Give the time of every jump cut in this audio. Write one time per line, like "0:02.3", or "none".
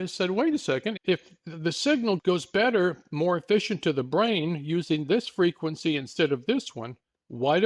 0:01.0
0:02.2